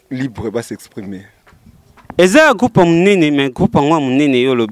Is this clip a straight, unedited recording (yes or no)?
yes